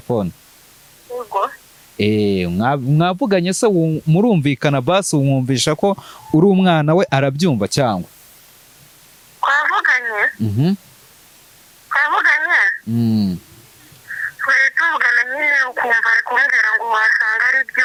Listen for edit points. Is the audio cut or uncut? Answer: uncut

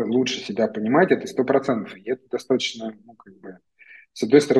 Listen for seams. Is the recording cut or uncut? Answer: uncut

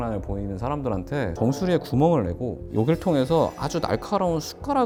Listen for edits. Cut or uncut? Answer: uncut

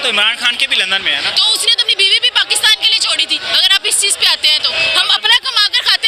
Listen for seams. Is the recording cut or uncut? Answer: cut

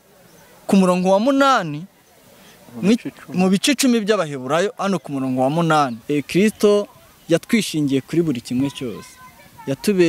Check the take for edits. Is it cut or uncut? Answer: cut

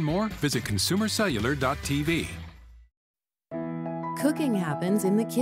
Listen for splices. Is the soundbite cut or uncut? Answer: cut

